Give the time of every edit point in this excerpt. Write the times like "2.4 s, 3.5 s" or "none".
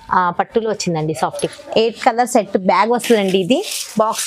1.4 s